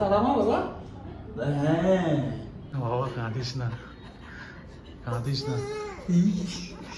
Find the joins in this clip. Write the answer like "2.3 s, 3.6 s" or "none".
2.7 s